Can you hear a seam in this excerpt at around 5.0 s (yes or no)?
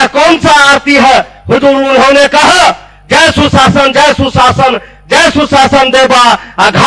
no